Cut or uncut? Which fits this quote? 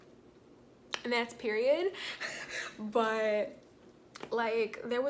uncut